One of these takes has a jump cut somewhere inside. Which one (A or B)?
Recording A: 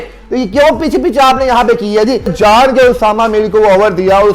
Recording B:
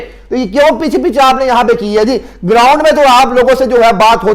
A